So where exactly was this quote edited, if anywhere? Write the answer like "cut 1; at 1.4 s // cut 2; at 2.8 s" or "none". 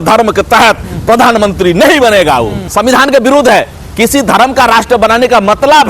cut 1; at 2.6 s